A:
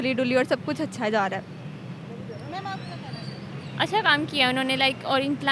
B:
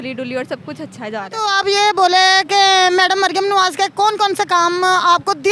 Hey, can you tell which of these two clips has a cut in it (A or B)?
B